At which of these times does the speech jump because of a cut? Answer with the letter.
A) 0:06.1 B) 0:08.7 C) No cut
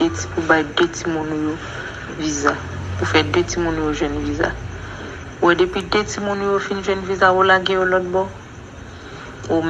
C